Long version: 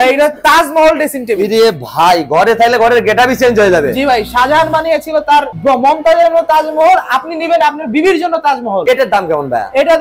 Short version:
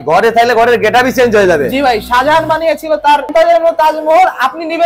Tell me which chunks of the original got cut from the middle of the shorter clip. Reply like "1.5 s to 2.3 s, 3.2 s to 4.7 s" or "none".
5.5 s to 6.0 s